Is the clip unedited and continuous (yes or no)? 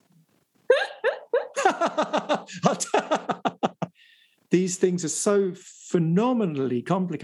no